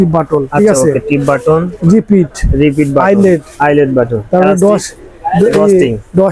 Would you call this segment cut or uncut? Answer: uncut